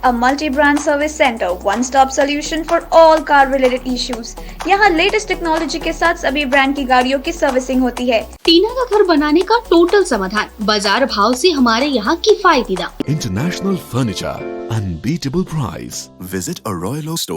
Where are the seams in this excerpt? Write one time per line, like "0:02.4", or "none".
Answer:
0:08.3
0:13.0